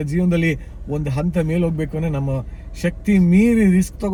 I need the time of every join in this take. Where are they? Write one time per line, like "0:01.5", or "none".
none